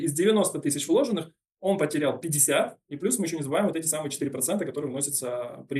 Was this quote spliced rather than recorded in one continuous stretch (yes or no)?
no